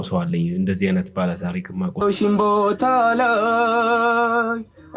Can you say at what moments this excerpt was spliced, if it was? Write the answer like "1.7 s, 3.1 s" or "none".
2.0 s